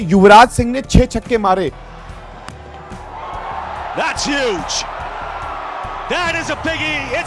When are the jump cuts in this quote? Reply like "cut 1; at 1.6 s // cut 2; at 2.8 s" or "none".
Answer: none